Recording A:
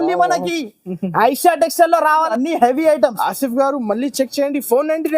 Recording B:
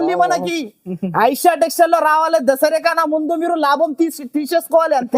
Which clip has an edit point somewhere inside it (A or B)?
A